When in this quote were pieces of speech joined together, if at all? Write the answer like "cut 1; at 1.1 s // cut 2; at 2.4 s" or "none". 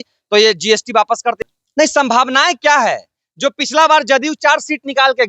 cut 1; at 1.4 s